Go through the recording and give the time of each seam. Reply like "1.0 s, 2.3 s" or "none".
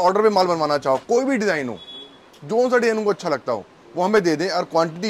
none